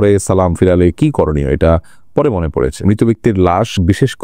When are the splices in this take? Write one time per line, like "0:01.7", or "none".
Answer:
0:02.8